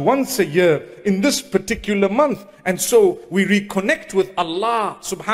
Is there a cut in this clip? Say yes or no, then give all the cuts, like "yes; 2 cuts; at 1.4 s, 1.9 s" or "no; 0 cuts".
no; 0 cuts